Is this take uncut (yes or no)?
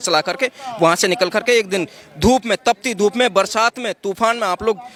yes